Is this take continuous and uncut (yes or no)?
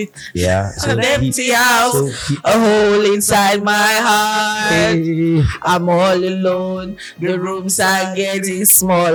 yes